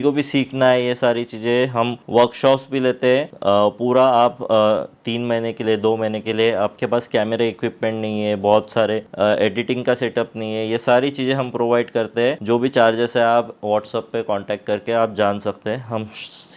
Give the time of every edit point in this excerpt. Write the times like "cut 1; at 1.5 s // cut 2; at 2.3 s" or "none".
cut 1; at 2.0 s // cut 2; at 3.3 s // cut 3; at 9.1 s